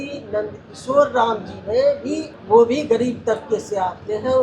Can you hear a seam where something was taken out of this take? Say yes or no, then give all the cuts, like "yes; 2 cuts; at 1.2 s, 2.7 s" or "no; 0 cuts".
yes; 1 cut; at 2.3 s